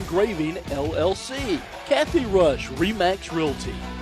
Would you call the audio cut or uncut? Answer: cut